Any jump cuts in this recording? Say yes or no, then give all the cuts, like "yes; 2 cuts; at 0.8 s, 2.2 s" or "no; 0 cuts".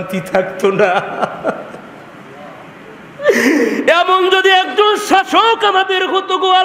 no; 0 cuts